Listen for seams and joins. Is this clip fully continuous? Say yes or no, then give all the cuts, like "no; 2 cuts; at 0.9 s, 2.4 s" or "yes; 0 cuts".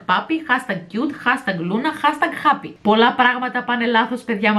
no; 1 cut; at 2.7 s